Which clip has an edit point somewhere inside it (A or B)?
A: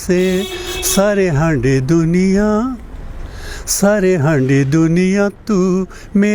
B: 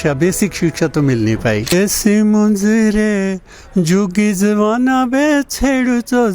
B